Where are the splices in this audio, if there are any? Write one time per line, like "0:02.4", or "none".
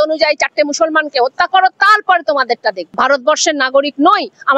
0:02.9